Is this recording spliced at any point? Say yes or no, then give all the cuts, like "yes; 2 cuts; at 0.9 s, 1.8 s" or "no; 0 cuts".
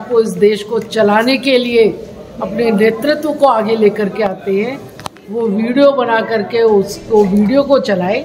no; 0 cuts